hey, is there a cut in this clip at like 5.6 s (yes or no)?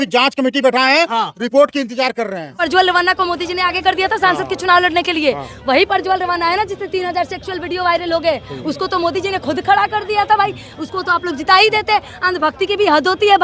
no